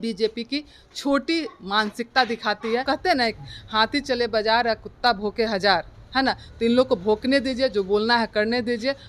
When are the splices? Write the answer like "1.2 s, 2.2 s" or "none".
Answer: 2.8 s